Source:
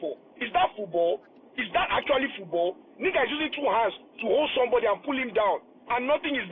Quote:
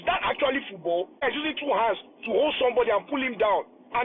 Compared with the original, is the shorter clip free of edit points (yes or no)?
no